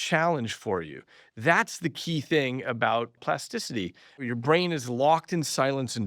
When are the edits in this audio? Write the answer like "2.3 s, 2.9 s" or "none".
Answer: 4.3 s

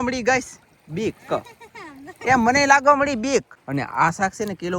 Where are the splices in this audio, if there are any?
3.6 s

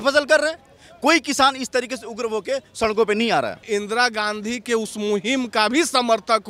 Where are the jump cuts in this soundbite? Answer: 3.6 s

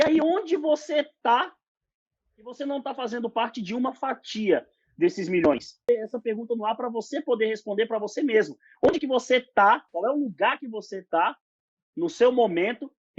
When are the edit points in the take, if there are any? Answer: 5.8 s, 9.9 s

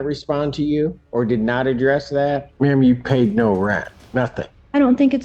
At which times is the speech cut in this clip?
1.0 s, 2.5 s, 4.2 s

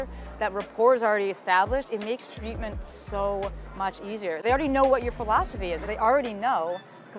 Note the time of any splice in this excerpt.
5.8 s

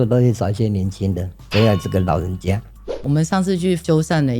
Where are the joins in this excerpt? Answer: 2.8 s

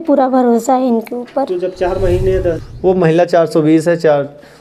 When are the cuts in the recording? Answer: 2.6 s

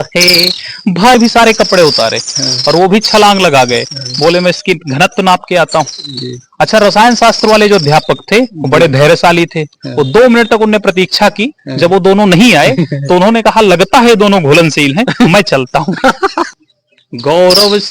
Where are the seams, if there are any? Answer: 1.1 s, 16.5 s

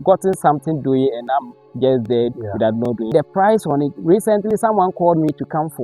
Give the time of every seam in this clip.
3.1 s

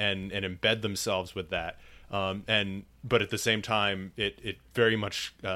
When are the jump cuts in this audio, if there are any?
none

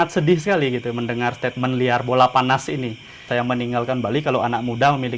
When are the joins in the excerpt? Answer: 3.3 s

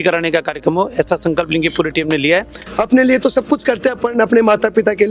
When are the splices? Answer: 2.6 s

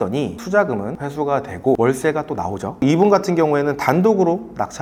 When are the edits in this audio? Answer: none

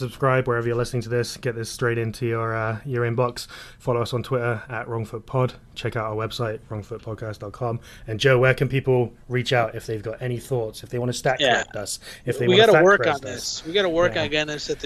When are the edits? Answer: none

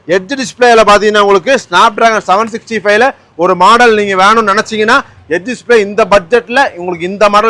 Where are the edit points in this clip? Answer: none

